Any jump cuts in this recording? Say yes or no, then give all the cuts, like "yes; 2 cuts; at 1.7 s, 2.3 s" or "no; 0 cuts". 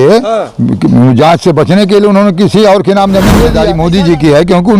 yes; 1 cut; at 3.6 s